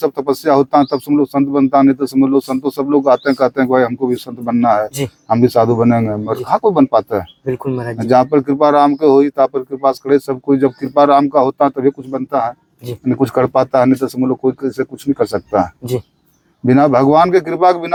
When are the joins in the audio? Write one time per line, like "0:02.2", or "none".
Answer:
none